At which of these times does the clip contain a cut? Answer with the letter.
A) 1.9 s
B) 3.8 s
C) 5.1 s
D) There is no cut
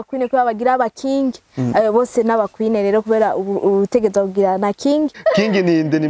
C